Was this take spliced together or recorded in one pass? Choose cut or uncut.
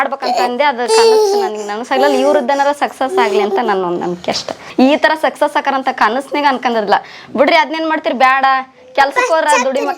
cut